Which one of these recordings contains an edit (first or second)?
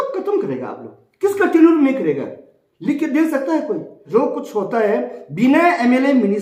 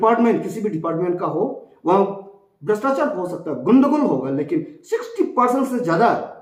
first